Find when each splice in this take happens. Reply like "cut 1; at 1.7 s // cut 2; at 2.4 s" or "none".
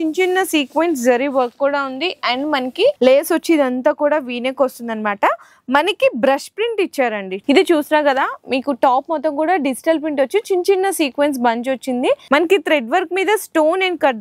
cut 1; at 3.0 s // cut 2; at 7.4 s // cut 3; at 12.3 s